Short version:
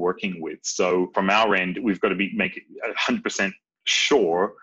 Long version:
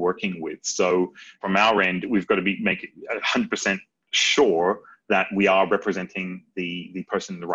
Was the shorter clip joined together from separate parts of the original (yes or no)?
yes